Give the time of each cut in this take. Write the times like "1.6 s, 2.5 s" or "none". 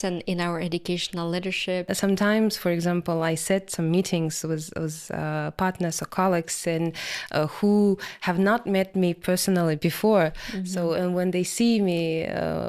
1.9 s

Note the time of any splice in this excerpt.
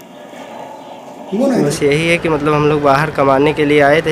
1.7 s

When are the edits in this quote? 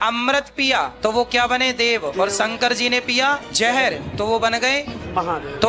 0.9 s, 3.5 s

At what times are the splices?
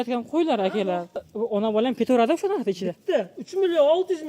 1.3 s

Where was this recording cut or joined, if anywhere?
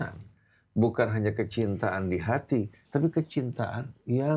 2.8 s

